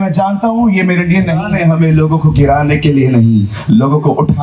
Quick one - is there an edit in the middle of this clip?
yes; 1 cut; at 1.4 s

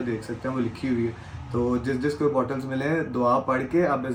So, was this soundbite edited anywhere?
no; 0 cuts

